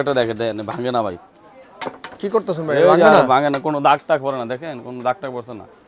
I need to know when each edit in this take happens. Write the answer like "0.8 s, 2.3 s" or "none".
none